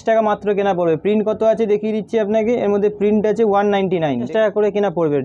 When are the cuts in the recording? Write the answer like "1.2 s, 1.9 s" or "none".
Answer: 4.3 s

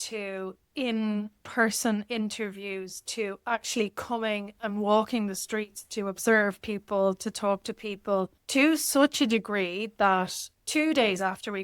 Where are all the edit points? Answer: 8.4 s, 10.6 s

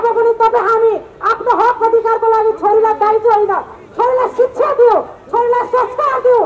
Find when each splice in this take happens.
none

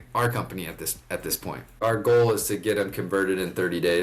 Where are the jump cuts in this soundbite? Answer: 1.8 s

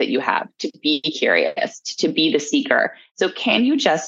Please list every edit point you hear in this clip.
3.0 s

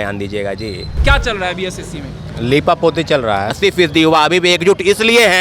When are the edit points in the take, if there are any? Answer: 1.0 s, 3.5 s

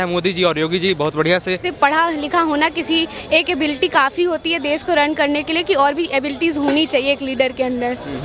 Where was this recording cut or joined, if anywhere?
1.7 s

